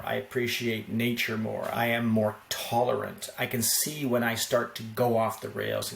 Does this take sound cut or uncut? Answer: cut